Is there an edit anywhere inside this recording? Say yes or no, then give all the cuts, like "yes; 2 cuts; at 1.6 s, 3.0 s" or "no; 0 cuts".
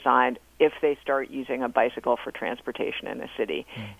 no; 0 cuts